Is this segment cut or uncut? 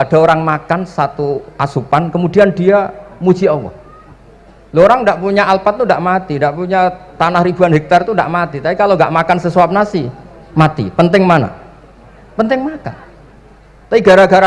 uncut